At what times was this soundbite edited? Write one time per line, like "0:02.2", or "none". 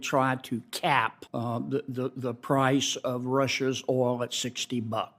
none

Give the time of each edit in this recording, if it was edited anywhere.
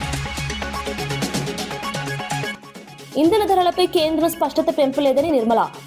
0:02.5

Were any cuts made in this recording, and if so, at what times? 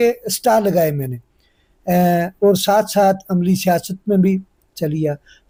none

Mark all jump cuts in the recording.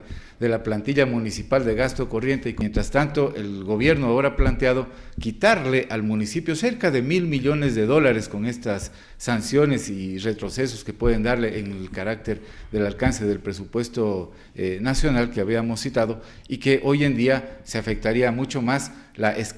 0:02.6

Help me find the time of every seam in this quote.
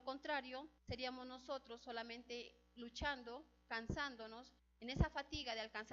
0:02.8

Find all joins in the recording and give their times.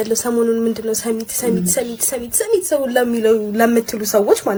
none

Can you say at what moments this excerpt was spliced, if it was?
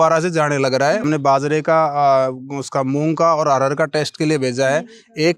0:01.0

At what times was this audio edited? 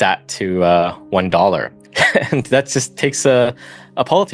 0:01.8

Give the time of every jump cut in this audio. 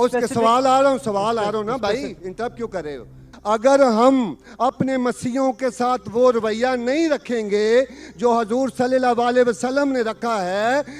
0:03.2

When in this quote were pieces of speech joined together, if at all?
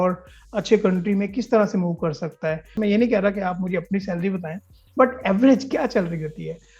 0:02.8

